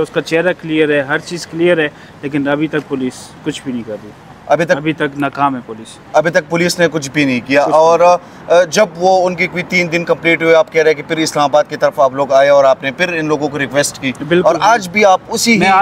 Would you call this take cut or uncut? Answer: uncut